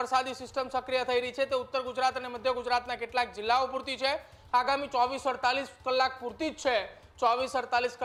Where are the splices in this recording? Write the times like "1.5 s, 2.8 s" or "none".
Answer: none